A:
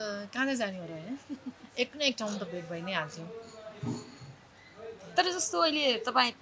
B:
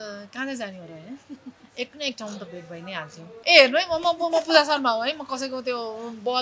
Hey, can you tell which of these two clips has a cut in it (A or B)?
B